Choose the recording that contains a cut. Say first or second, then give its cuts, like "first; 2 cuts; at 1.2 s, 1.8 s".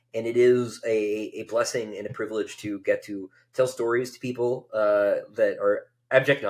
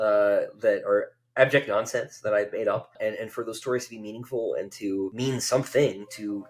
second; 2 cuts; at 2.9 s, 5.1 s